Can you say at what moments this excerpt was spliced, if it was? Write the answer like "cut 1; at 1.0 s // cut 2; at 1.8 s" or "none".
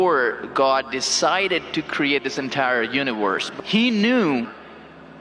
cut 1; at 3.5 s